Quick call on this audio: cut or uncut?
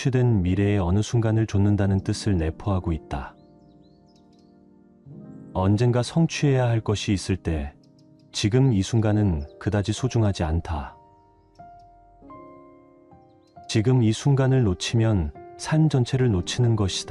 uncut